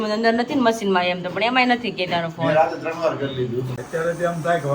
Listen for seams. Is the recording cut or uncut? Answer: cut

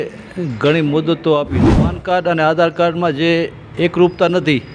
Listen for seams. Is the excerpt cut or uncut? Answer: cut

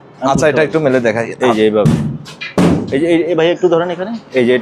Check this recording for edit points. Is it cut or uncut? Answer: uncut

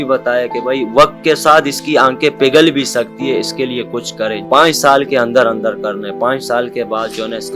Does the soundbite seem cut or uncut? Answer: cut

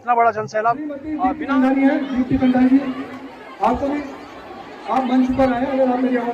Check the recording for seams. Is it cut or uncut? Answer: cut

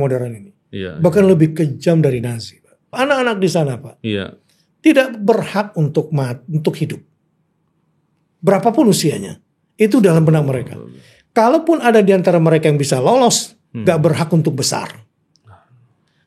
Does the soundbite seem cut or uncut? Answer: cut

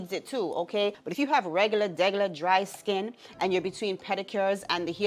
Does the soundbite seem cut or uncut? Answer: cut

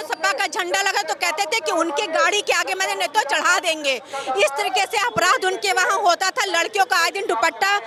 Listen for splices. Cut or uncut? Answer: uncut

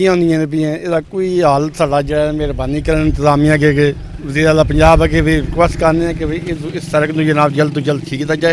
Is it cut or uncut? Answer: uncut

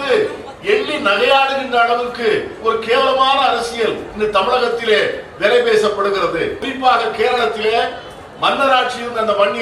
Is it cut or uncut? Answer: cut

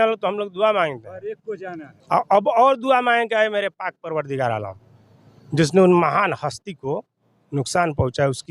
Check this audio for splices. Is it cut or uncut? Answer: uncut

